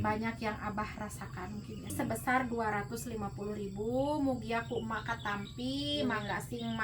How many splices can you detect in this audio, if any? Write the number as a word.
one